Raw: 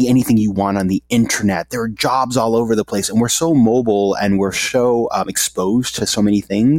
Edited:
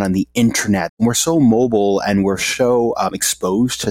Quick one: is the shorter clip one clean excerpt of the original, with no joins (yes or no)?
no